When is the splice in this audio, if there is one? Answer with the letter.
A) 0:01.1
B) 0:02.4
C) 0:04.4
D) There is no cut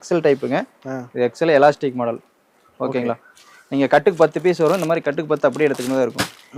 D